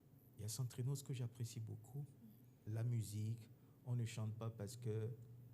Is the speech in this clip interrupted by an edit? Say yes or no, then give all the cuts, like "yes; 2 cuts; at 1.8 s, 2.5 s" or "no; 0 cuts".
yes; 1 cut; at 2.6 s